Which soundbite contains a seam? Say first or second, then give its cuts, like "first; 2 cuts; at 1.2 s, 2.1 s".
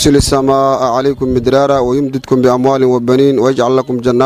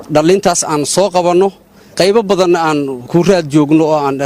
second; 2 cuts; at 1.9 s, 3.0 s